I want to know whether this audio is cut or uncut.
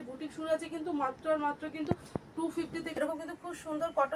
cut